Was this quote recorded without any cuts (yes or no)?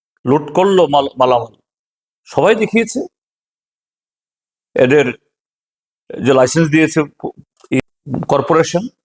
no